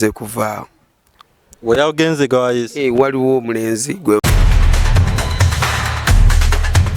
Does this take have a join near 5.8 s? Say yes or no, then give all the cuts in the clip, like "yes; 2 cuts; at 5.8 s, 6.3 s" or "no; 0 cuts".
no; 1 cut; at 4.2 s